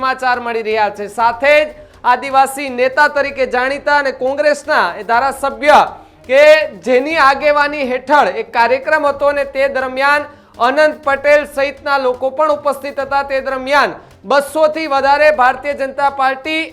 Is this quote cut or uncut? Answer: uncut